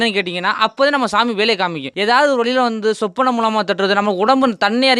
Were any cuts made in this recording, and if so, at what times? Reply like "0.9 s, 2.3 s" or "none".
1.9 s